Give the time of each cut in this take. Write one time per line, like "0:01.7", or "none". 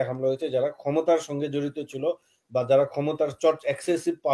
none